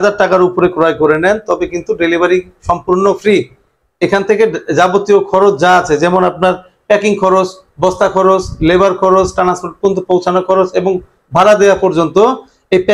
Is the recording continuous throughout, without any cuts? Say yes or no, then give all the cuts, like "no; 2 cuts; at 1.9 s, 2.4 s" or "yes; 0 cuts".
yes; 0 cuts